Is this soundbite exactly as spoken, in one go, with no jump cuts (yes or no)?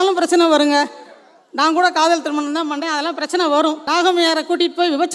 no